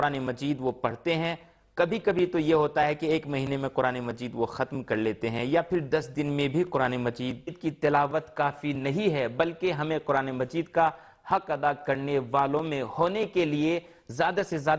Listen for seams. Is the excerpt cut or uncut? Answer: uncut